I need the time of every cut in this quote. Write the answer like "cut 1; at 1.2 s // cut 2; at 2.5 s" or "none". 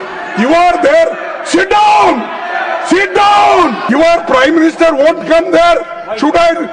cut 1; at 3.8 s